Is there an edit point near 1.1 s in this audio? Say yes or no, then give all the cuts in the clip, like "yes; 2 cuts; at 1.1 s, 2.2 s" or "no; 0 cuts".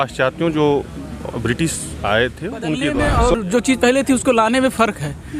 no; 1 cut; at 2.9 s